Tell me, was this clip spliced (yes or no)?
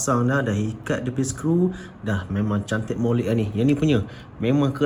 no